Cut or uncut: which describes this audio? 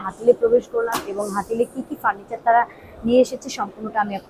uncut